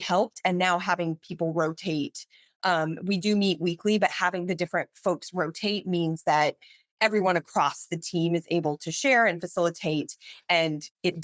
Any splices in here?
no; 0 cuts

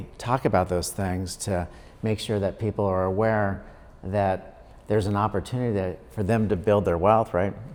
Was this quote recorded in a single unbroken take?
yes; 0 cuts

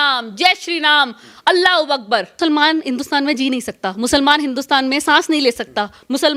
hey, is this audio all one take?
yes; 0 cuts

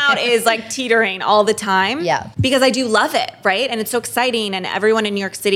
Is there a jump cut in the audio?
yes; 1 cut; at 2.3 s

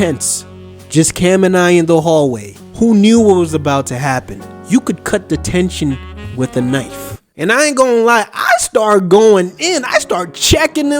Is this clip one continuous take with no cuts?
yes; 0 cuts

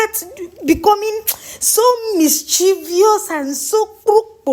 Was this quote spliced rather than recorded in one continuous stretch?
no; 0 cuts

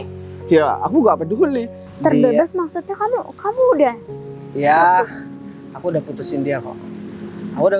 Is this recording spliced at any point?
yes; 1 cut; at 1.8 s

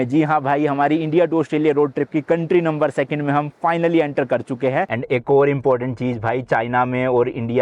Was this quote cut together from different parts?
yes; 1 cut; at 4.9 s

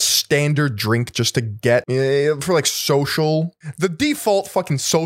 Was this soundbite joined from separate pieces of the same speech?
yes; 2 cuts; at 1.9 s, 3.6 s

